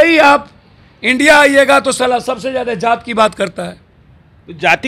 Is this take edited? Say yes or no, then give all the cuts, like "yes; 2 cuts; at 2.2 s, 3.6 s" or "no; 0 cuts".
no; 0 cuts